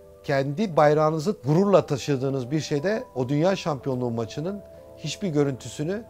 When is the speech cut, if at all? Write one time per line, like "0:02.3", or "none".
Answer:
0:01.4